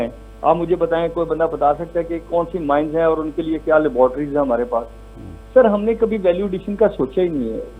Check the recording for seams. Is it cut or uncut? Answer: uncut